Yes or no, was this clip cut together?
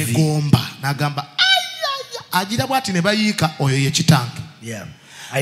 no